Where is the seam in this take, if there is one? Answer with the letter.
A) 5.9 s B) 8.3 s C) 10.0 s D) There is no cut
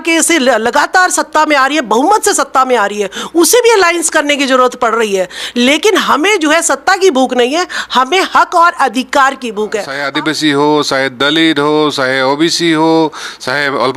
C